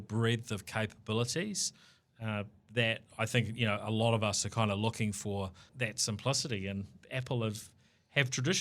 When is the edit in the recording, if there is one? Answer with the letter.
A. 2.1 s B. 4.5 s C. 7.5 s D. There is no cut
D